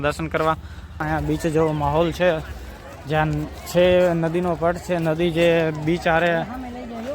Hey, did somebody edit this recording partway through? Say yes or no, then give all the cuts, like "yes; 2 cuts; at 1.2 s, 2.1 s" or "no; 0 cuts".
yes; 1 cut; at 1.0 s